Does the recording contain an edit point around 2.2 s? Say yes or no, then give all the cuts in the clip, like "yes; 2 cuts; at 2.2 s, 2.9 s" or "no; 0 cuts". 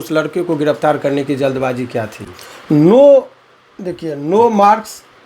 yes; 1 cut; at 2.2 s